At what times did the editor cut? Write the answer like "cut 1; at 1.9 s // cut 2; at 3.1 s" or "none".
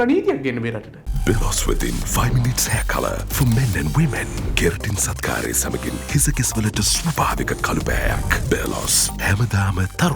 none

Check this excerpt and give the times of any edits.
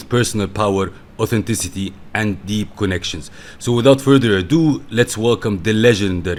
none

